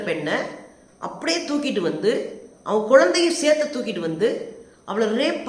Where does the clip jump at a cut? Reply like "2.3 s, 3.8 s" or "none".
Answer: none